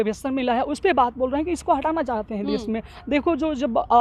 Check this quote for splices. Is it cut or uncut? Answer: uncut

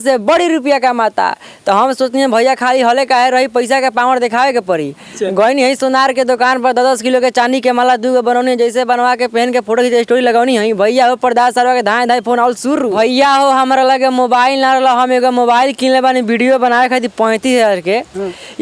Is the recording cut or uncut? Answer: cut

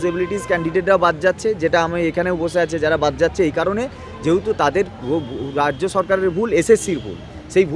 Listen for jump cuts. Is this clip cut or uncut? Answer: uncut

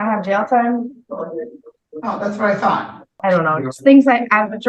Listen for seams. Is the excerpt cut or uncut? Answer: cut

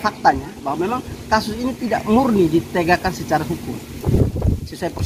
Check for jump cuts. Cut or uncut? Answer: uncut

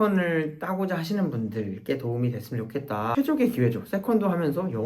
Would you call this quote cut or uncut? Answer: cut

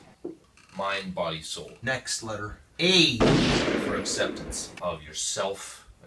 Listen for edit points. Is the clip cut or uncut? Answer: cut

